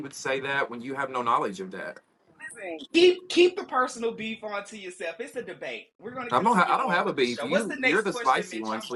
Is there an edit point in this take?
no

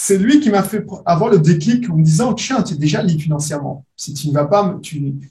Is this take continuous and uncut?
yes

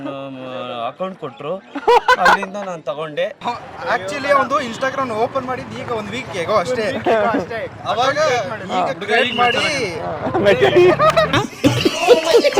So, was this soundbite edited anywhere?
yes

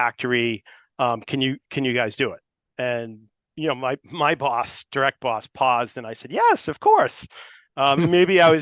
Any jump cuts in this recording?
no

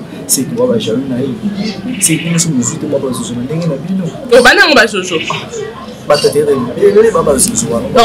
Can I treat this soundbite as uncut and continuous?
yes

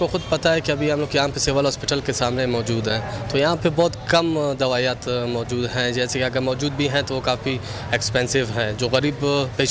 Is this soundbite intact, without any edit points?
yes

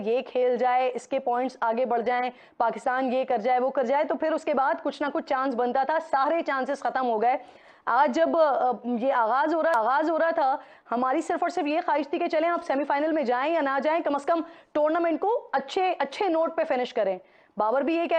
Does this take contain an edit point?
no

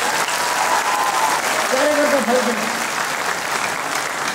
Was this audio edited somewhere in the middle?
no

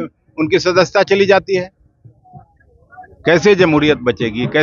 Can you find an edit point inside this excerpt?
no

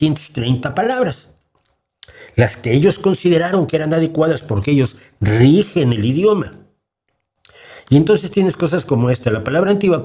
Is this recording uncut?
yes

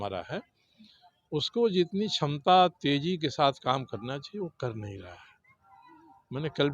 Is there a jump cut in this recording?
no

